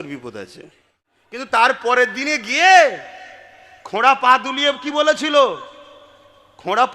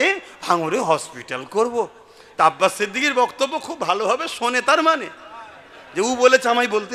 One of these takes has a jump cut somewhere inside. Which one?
first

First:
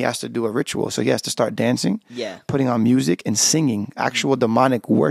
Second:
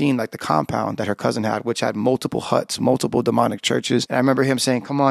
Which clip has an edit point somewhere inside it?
second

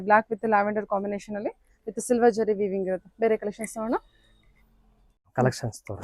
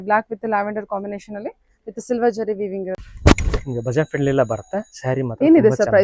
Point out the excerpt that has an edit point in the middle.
second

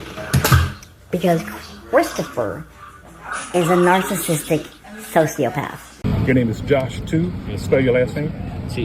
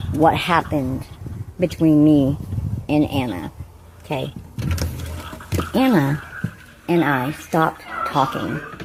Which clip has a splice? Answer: first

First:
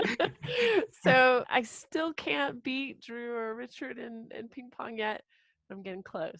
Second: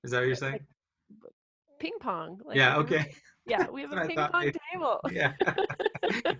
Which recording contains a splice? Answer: first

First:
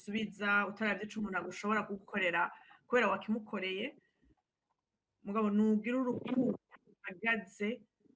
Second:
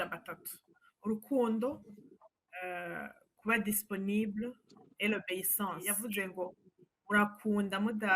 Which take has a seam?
second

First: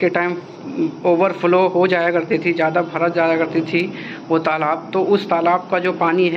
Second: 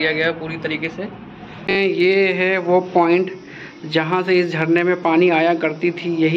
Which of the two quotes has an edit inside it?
second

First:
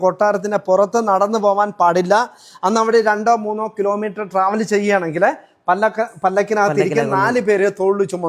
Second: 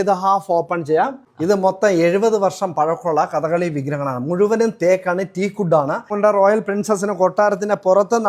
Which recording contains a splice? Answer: second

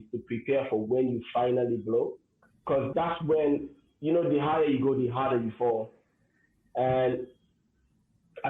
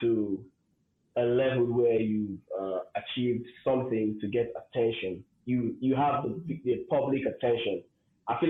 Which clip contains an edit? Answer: first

